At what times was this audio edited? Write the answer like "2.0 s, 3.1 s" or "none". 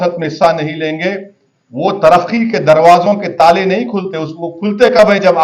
none